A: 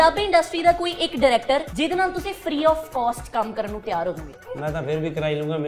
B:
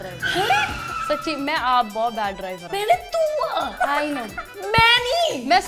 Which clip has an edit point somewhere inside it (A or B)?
A